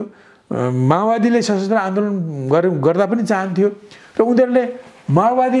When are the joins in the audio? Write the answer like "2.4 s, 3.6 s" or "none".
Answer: none